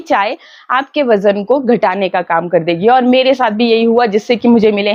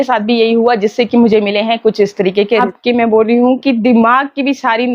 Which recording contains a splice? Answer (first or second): second